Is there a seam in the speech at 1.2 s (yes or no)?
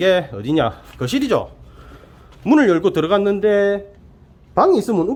no